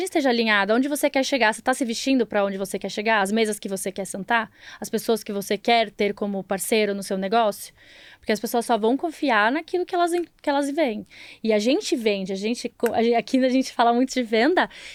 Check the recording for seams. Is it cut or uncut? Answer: uncut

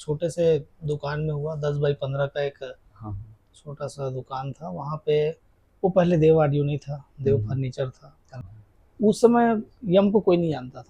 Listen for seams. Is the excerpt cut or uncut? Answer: cut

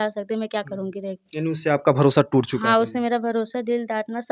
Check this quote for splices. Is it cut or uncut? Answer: uncut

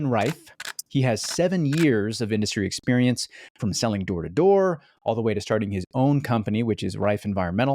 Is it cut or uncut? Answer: uncut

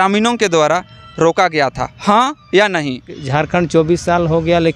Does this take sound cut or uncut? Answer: cut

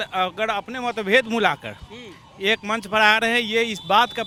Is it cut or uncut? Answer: uncut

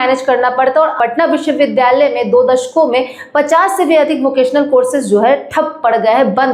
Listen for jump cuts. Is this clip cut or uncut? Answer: cut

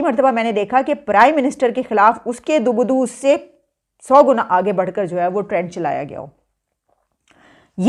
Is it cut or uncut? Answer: uncut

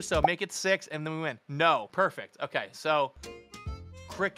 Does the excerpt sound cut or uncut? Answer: cut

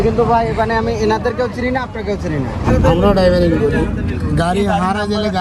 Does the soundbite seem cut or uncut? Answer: cut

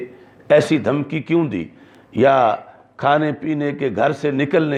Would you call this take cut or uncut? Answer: uncut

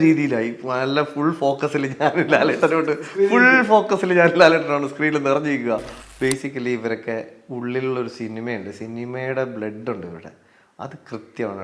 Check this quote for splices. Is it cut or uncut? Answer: cut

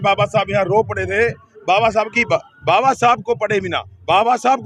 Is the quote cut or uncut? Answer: cut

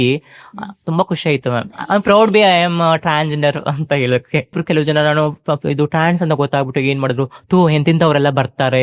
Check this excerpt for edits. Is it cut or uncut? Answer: cut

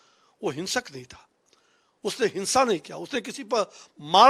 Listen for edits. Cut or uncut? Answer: uncut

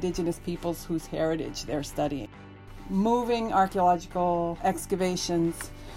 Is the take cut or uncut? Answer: cut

